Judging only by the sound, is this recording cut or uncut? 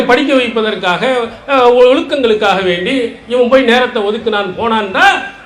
uncut